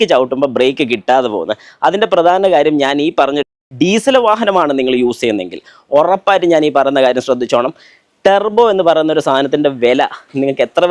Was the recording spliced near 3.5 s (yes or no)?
yes